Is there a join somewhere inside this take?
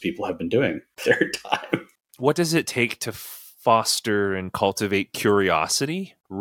yes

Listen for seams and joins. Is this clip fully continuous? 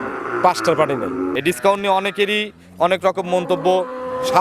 no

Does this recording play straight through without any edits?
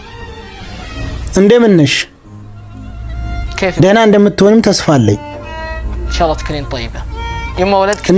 yes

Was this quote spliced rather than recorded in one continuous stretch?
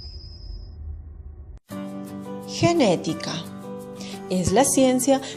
yes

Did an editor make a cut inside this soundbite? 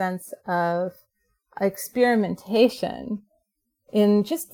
no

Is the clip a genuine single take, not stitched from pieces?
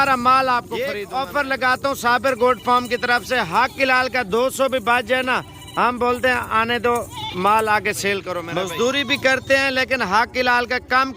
no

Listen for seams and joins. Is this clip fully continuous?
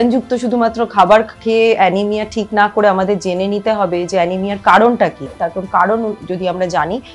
no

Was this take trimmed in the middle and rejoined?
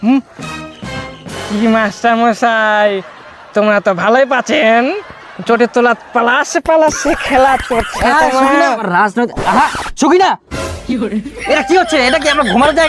yes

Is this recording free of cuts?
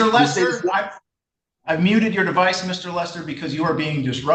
yes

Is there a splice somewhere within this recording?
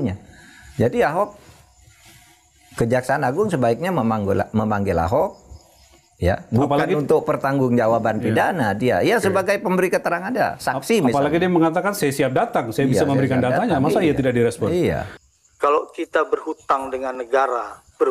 yes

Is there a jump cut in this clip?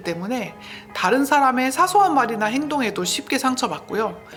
no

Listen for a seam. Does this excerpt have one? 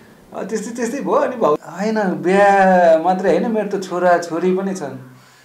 yes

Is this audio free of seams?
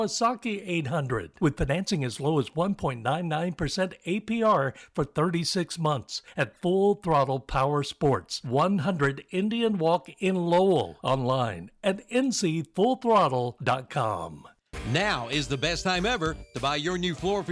no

